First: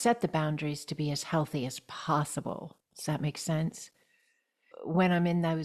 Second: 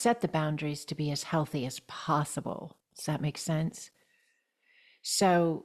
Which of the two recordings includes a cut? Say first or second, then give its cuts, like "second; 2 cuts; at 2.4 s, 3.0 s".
first; 1 cut; at 4.7 s